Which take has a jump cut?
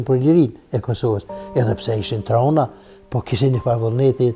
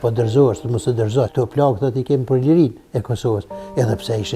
second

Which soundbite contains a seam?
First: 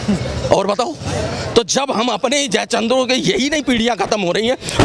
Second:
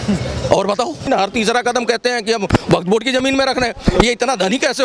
second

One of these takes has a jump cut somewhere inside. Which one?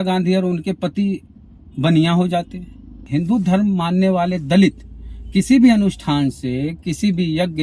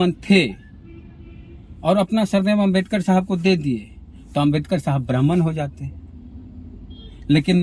first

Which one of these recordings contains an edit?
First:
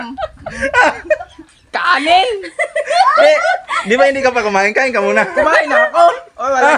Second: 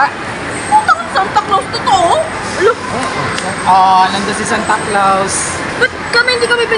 first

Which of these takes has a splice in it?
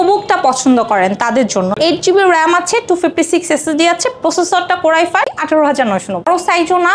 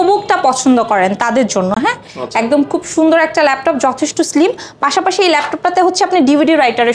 first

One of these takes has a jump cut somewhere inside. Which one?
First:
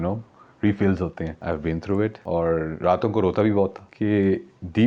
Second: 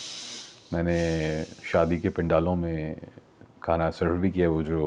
first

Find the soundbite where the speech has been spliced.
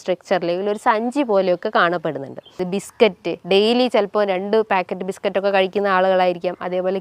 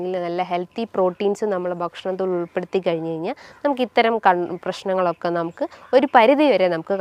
first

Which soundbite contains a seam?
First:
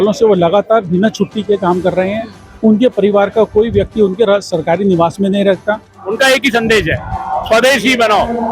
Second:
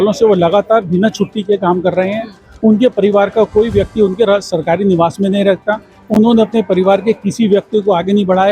first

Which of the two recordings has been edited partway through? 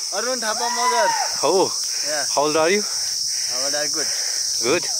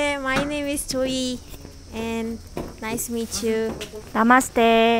second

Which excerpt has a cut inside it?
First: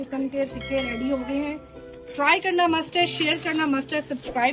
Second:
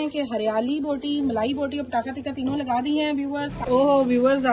second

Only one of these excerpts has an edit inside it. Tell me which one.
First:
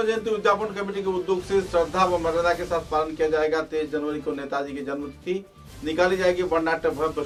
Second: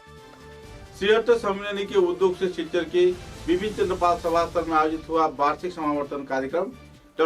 second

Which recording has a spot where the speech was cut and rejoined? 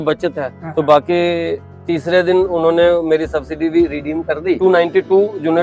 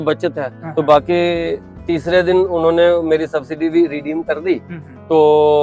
first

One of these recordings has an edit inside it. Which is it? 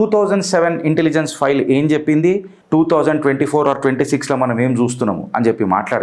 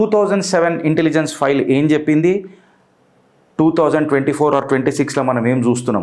first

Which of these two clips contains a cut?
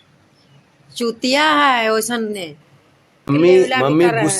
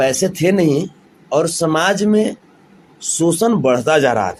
first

